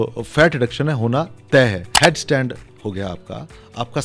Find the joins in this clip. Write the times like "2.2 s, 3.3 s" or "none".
1.9 s